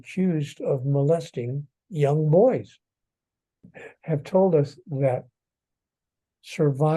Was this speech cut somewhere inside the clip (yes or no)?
yes